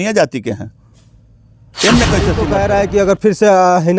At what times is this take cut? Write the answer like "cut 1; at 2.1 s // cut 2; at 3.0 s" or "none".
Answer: cut 1; at 2.4 s